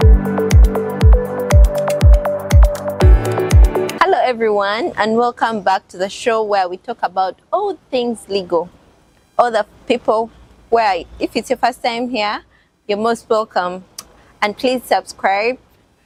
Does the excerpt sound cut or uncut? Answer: uncut